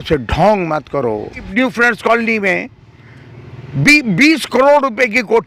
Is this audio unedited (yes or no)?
no